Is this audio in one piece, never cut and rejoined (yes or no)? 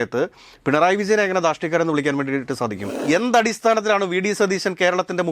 no